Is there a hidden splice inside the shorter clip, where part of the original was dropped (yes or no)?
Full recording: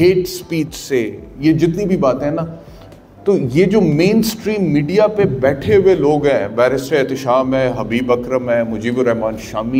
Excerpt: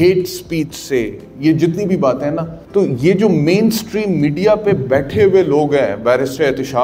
yes